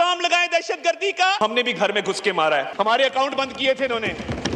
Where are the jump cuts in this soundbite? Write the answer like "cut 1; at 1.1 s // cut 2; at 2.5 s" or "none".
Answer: cut 1; at 1.4 s // cut 2; at 2.7 s